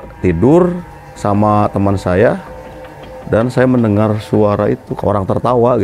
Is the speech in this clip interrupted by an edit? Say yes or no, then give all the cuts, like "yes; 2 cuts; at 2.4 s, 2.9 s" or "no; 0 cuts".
yes; 1 cut; at 4.9 s